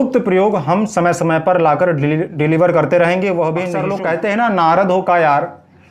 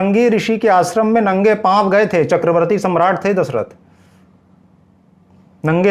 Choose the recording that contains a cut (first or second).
first